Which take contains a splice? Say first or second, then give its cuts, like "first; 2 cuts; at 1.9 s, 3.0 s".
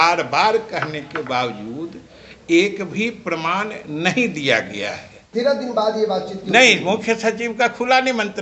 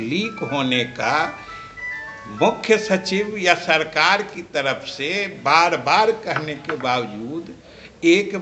first; 1 cut; at 5.2 s